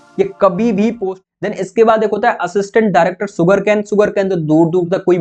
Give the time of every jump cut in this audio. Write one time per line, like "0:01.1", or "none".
0:01.1